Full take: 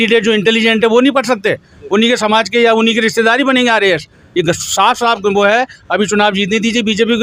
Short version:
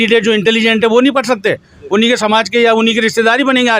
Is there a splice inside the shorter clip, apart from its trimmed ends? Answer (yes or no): no